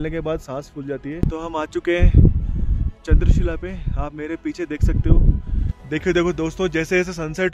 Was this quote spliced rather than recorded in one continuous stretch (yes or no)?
yes